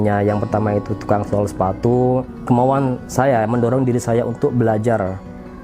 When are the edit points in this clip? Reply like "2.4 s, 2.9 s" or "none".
2.3 s